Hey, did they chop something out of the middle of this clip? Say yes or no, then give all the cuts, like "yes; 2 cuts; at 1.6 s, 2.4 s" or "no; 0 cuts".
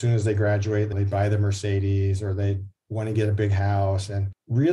yes; 1 cut; at 0.9 s